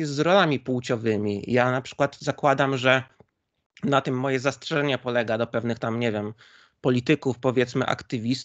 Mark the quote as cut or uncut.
uncut